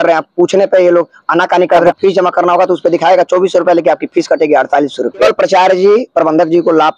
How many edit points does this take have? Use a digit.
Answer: 2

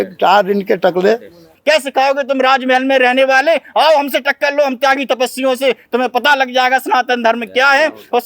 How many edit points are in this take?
1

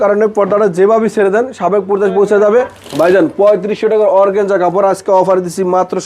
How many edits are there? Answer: 1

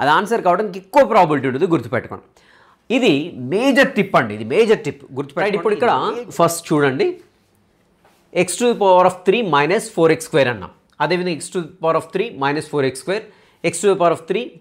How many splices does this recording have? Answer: 1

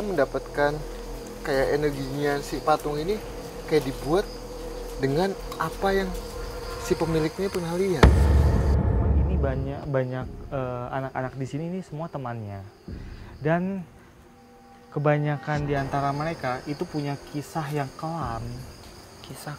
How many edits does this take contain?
1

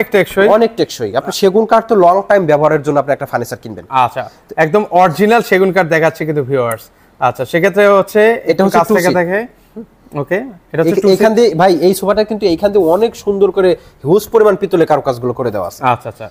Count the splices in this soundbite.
0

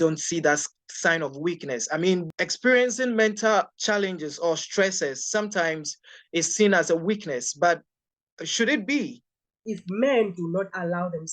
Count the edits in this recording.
3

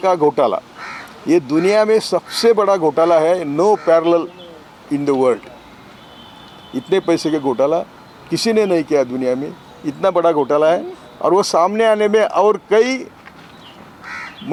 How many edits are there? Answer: 0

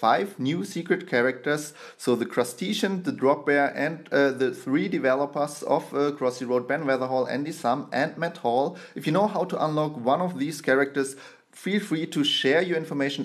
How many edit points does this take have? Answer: 0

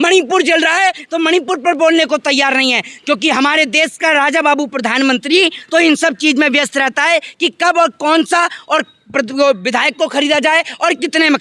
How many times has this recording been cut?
0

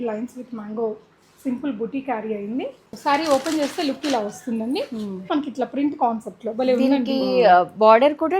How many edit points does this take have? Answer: 2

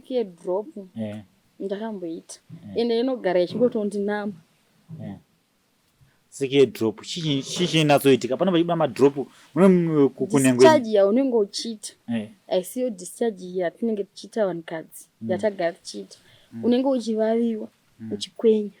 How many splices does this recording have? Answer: 0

